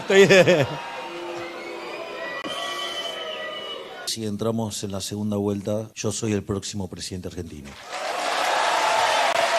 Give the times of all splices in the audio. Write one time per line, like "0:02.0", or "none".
0:04.1
0:05.9